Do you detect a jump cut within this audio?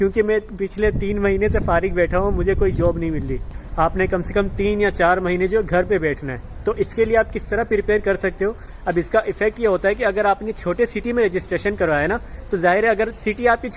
yes; 2 cuts; at 3.6 s, 8.7 s

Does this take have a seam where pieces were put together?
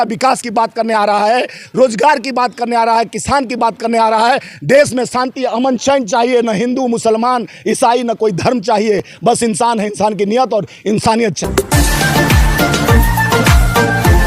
no; 0 cuts

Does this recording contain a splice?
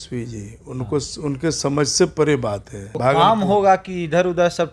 yes; 1 cut; at 2.9 s

